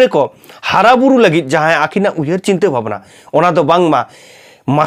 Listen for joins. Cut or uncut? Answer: uncut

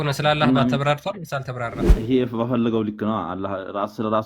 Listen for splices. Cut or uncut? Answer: cut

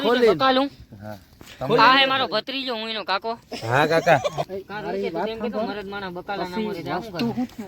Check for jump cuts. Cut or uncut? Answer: cut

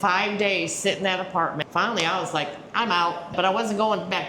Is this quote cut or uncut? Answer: cut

